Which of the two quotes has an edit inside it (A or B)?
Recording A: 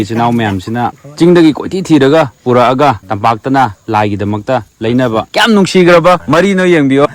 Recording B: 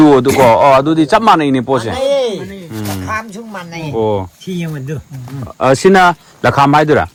A